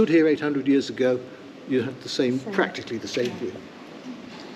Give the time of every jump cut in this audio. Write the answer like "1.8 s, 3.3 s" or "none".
none